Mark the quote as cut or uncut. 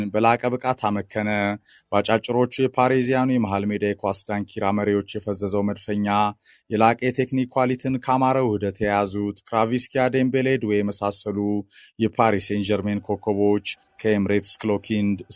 uncut